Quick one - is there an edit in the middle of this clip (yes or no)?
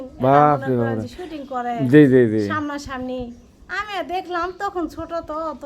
no